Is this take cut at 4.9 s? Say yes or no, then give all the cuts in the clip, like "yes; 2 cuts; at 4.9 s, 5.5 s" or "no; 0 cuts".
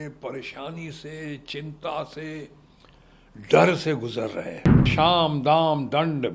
yes; 1 cut; at 4.9 s